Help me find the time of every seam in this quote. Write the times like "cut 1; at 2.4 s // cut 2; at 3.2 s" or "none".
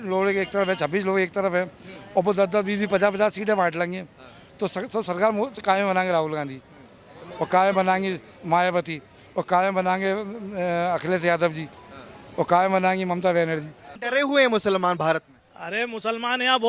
cut 1; at 14.0 s